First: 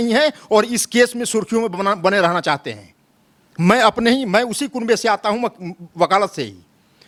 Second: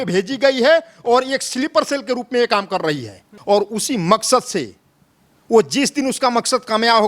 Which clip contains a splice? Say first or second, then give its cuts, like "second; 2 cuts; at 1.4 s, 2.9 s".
second; 1 cut; at 3.3 s